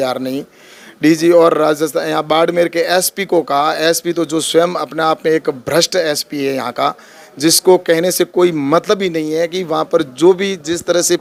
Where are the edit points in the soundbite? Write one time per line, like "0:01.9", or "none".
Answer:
none

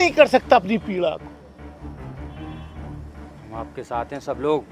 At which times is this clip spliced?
0:01.4
0:03.4

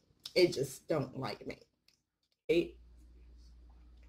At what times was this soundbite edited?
0:02.5

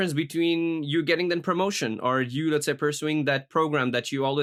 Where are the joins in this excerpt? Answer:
none

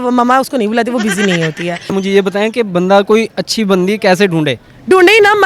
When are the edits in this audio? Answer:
0:01.7

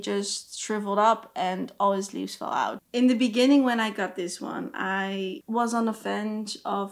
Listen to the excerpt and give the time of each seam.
0:02.8
0:05.4

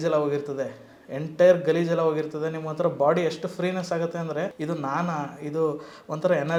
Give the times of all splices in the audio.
none

